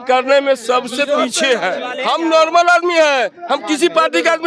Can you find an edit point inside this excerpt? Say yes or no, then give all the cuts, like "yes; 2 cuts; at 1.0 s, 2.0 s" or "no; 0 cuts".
yes; 1 cut; at 1.8 s